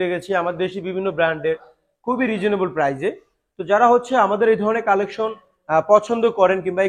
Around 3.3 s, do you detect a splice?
no; 0 cuts

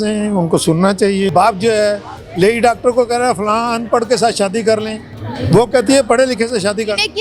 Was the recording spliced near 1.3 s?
yes; 1 cut; at 1.3 s

